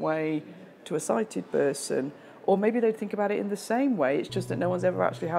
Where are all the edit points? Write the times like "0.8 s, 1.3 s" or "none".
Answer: none